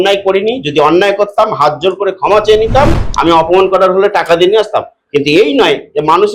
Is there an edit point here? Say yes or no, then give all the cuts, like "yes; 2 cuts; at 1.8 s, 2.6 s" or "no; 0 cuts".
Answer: yes; 1 cut; at 3.0 s